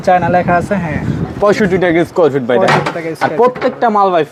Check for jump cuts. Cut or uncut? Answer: uncut